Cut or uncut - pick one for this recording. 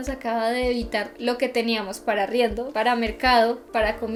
uncut